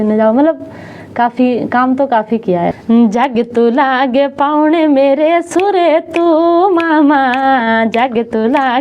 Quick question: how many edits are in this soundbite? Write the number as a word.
one